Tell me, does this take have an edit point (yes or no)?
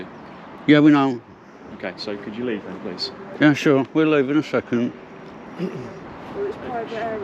yes